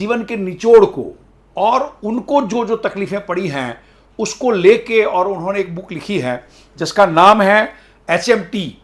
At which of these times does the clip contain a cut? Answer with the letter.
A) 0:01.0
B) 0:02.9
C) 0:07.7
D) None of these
D